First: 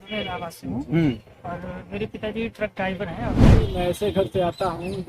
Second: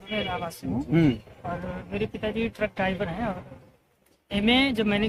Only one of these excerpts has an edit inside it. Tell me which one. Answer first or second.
first